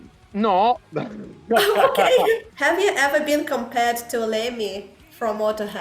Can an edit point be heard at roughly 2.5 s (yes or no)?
yes